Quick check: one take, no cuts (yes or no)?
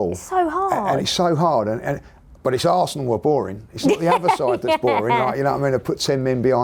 yes